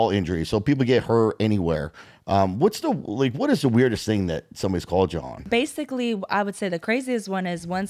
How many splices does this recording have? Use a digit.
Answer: 1